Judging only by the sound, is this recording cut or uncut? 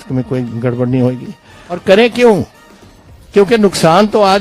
cut